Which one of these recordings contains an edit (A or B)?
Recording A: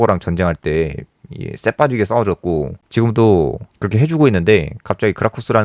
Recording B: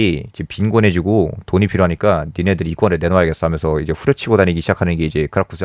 A